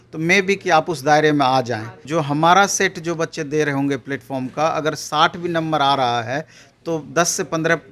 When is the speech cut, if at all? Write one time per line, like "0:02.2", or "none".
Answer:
0:01.9